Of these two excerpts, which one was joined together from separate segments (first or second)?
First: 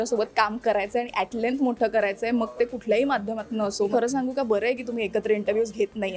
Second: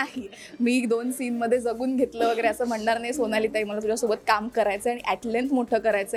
first